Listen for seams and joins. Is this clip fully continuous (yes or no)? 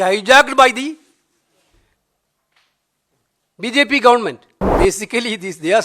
no